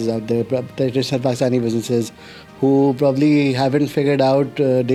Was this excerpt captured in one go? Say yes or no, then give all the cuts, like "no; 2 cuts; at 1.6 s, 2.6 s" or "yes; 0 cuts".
yes; 0 cuts